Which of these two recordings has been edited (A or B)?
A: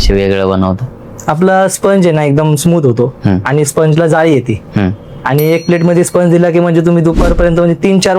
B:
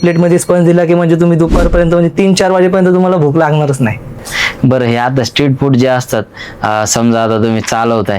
B